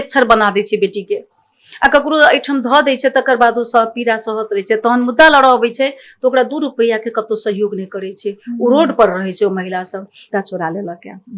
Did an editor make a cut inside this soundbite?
yes; 1 cut; at 10.3 s

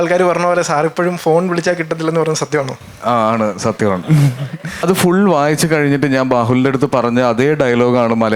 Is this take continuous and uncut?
no; 1 cut; at 4.8 s

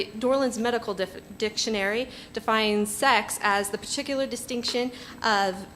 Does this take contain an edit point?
yes; 1 cut; at 4.0 s

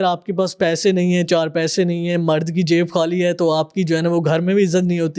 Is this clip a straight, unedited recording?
yes; 0 cuts

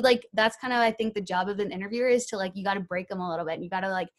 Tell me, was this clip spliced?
no; 0 cuts

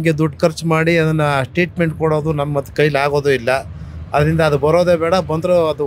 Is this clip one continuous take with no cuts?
yes; 0 cuts

